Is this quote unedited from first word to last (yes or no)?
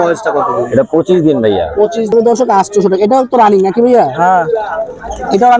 no